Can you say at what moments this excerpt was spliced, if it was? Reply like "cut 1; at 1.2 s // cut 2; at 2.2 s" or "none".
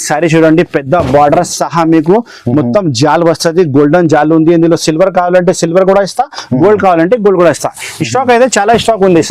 none